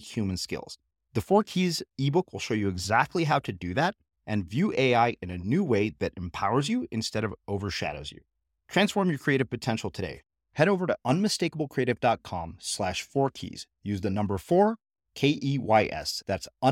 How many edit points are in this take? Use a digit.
0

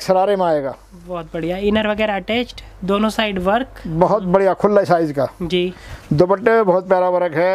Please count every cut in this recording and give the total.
0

